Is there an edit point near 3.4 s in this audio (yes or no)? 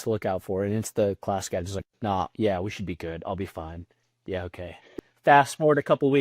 no